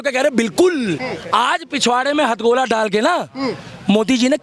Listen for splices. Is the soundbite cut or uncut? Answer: cut